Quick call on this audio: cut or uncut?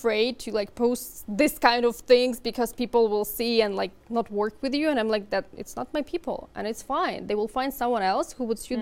uncut